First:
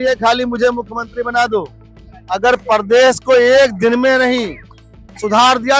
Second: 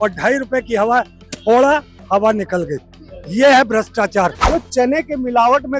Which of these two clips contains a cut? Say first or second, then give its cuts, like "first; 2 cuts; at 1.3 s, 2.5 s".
second; 1 cut; at 4.4 s